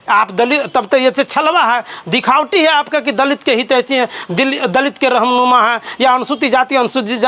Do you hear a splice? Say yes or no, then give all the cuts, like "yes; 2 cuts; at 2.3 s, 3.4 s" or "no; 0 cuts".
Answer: no; 0 cuts